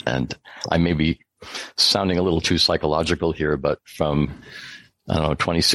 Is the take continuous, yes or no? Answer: yes